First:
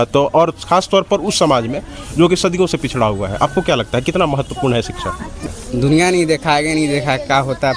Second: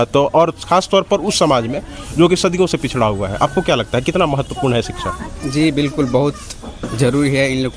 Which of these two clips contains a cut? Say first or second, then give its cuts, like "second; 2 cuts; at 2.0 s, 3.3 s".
first; 1 cut; at 5.4 s